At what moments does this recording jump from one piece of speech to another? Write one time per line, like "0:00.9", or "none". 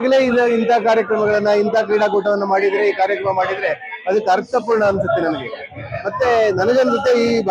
none